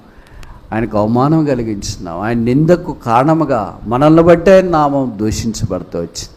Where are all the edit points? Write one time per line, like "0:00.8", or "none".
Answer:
none